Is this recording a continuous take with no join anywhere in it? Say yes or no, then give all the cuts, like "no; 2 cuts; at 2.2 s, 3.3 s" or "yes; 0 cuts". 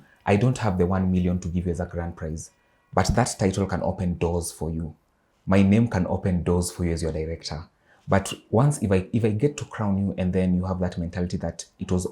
yes; 0 cuts